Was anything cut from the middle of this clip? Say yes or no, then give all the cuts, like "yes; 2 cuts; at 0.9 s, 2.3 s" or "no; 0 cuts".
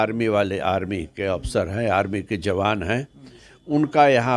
no; 0 cuts